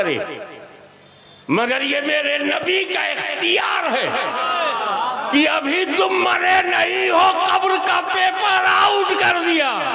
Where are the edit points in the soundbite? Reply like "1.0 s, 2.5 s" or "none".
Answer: none